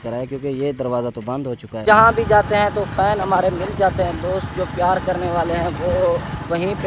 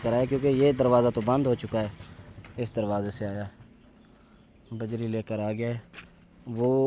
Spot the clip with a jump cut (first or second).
first